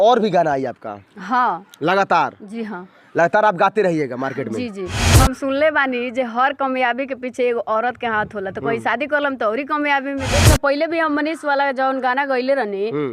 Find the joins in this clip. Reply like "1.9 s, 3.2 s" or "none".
4.9 s, 10.4 s